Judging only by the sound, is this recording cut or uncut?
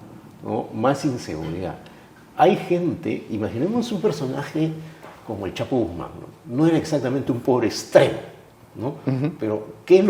uncut